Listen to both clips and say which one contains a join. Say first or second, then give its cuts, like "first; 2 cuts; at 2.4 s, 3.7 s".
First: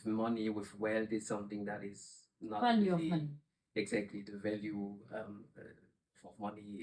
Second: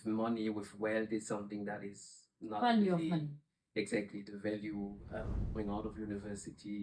second; 1 cut; at 5.6 s